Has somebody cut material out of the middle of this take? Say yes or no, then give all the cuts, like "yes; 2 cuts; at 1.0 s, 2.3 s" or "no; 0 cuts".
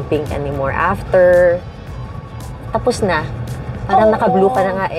no; 0 cuts